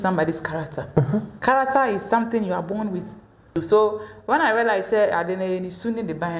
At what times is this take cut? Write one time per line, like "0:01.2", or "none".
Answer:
0:03.5